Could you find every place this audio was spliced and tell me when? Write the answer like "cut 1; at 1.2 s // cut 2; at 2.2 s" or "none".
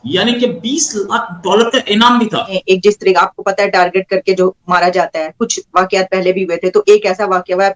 cut 1; at 2.5 s